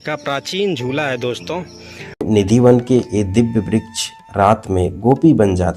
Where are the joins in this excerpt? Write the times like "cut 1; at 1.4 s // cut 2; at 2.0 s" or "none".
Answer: cut 1; at 2.2 s